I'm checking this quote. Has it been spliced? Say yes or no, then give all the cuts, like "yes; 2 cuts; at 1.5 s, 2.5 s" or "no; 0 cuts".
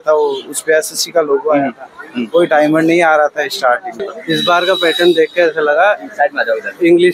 yes; 1 cut; at 4.1 s